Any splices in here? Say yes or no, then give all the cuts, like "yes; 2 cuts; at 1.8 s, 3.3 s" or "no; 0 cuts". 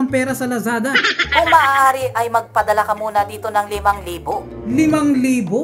yes; 2 cuts; at 1.1 s, 4.5 s